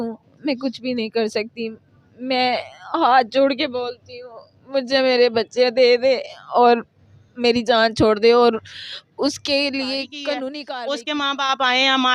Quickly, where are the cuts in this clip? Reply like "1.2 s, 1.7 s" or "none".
10.6 s